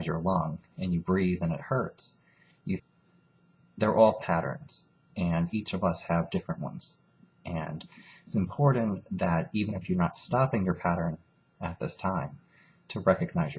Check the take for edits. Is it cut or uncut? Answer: uncut